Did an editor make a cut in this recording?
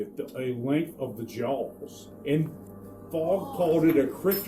yes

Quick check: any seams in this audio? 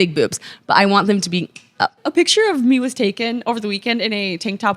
yes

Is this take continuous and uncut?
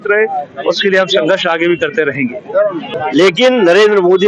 no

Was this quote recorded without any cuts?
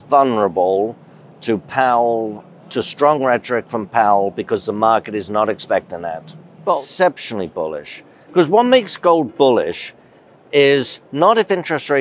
no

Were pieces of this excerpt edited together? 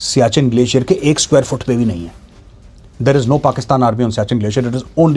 no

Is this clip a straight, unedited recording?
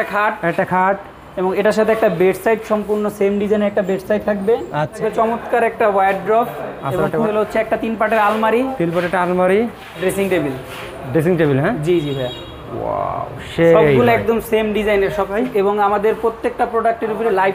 no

